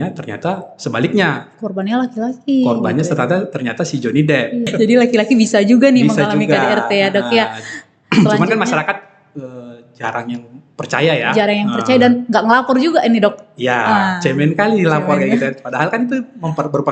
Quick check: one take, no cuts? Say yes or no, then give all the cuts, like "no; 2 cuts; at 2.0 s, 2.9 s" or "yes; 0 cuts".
no; 1 cut; at 4.7 s